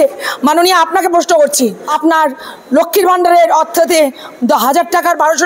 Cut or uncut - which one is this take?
cut